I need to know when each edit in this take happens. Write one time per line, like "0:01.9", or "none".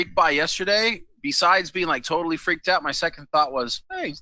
none

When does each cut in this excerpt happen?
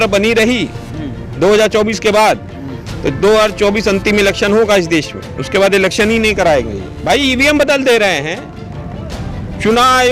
0:06.9

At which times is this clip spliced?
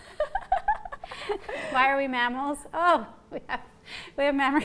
none

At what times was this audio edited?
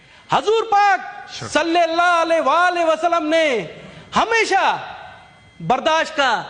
none

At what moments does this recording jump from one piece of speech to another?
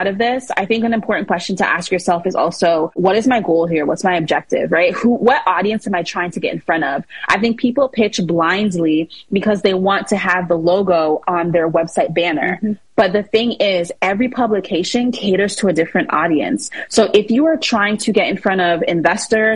none

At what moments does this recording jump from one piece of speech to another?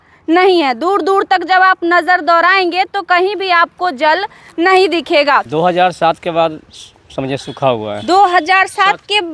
0:05.5

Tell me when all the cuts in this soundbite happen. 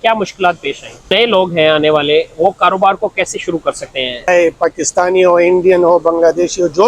0:01.1
0:04.3

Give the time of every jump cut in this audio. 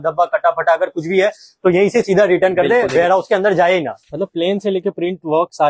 0:04.0

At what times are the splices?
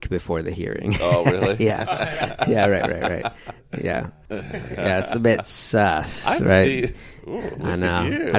0:04.2

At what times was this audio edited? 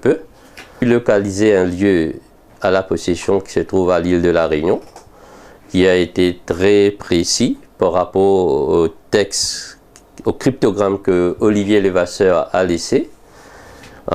0:11.3

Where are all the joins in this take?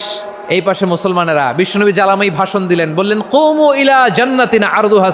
none

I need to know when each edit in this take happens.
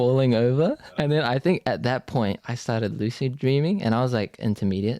0:01.0
0:02.5

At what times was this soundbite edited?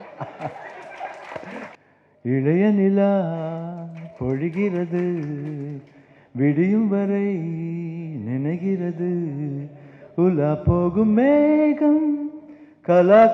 0:01.7

